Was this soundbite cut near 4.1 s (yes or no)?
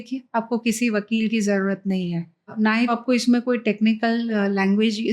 no